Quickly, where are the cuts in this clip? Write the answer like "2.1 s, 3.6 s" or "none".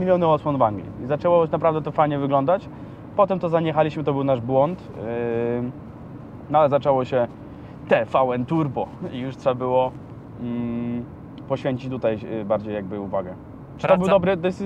none